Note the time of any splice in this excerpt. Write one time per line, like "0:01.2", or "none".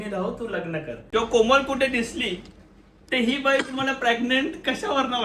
0:00.9